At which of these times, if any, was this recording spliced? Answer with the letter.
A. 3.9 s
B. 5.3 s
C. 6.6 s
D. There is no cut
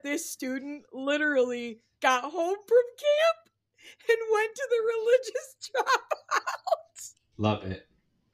D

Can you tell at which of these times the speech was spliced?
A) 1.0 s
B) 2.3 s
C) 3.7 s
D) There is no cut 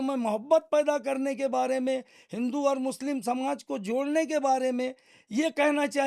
D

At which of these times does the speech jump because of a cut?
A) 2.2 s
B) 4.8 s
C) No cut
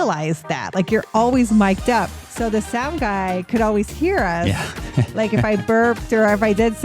A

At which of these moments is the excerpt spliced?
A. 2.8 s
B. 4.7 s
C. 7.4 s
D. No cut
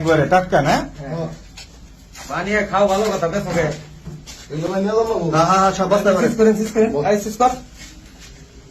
D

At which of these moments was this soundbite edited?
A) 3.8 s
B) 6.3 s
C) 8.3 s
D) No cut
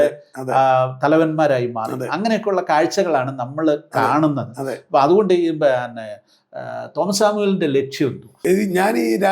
C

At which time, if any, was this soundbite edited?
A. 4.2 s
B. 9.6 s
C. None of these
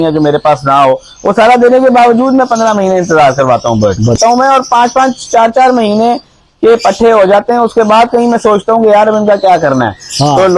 A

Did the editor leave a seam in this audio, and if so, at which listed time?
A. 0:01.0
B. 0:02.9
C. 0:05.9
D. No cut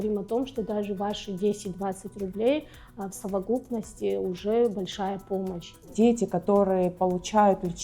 C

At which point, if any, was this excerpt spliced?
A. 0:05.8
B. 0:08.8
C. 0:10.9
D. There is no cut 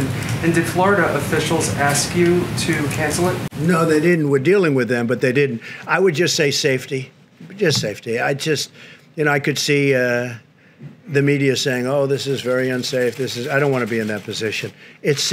D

